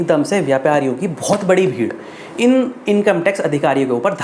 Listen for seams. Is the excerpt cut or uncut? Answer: uncut